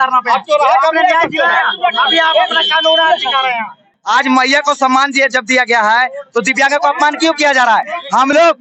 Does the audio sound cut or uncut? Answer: uncut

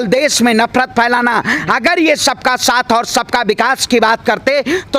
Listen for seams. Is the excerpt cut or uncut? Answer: uncut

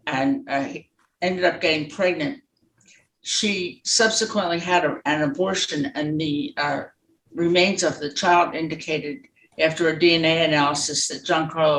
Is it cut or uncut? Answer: uncut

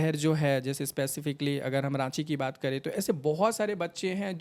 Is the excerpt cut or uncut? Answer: uncut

